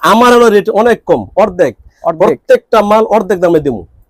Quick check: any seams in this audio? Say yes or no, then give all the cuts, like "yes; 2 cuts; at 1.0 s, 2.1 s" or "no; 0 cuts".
no; 0 cuts